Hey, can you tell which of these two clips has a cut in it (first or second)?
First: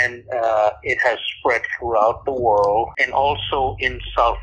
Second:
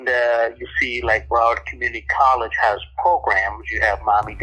first